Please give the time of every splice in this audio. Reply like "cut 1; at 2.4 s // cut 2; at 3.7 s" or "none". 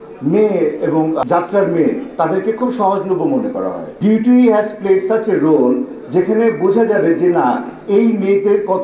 cut 1; at 1.2 s // cut 2; at 3.9 s